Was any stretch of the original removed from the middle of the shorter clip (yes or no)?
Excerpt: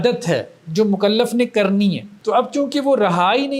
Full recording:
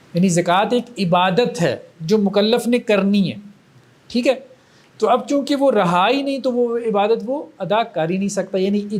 yes